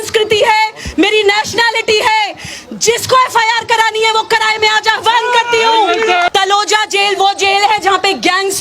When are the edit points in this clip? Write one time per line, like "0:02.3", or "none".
0:06.3

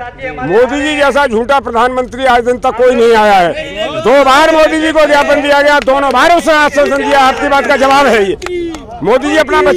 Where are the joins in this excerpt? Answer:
none

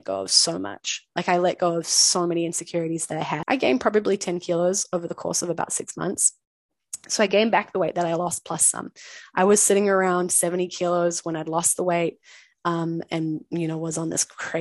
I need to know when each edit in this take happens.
0:03.4

